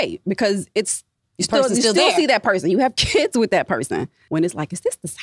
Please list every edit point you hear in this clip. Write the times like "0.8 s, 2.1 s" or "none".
4.2 s